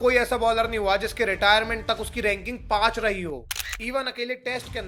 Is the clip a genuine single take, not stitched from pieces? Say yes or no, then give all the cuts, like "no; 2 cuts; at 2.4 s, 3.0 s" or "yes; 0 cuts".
yes; 0 cuts